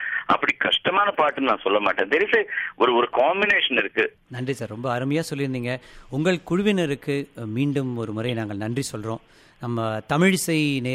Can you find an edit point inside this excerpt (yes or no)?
yes